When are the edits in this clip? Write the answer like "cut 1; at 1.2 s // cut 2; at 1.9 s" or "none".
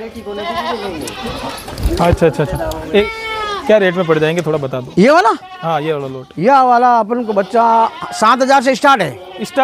cut 1; at 3.0 s

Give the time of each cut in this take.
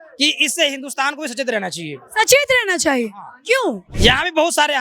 cut 1; at 3.9 s

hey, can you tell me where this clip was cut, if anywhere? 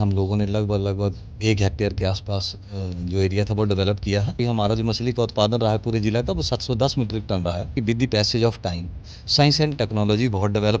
cut 1; at 1.3 s // cut 2; at 4.4 s // cut 3; at 7.7 s

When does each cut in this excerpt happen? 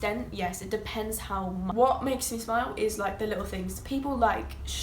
cut 1; at 1.7 s

